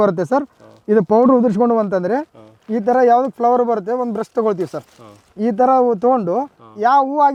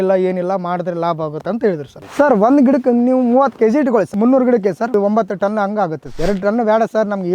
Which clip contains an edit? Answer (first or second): second